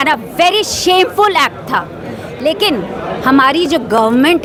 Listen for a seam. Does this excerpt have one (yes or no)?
no